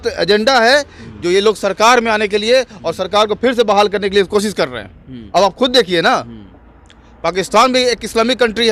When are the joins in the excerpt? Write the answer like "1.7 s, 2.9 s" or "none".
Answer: none